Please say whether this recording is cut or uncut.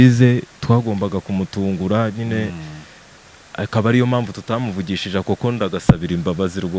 uncut